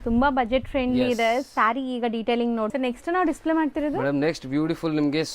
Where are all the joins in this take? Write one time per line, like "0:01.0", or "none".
0:02.7